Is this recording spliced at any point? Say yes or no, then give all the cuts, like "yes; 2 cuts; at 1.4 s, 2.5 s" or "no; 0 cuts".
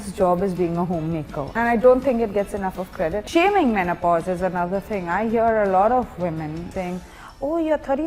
yes; 3 cuts; at 1.6 s, 3.2 s, 6.7 s